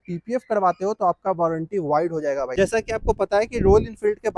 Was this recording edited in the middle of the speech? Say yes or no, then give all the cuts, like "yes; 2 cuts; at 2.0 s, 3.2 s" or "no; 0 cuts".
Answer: yes; 1 cut; at 2.5 s